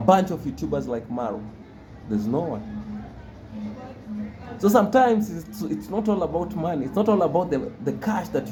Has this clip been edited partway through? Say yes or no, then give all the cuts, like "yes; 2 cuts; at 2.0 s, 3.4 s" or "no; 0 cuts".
no; 0 cuts